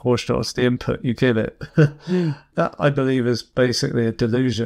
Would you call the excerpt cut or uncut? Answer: cut